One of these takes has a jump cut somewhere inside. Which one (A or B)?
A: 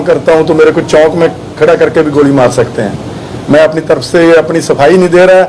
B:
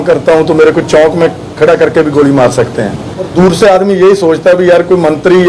B